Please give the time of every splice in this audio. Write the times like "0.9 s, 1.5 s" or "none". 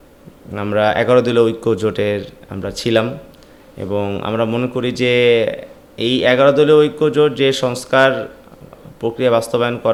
none